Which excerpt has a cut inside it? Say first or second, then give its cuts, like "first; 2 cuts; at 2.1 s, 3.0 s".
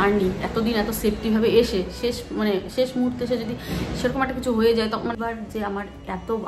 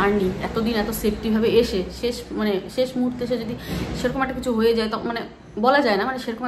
first; 1 cut; at 5.2 s